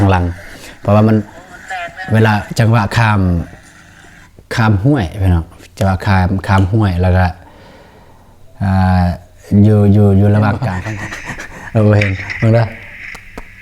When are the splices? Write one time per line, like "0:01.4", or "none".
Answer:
0:10.7